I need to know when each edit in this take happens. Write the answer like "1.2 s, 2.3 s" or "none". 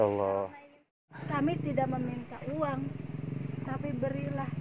1.2 s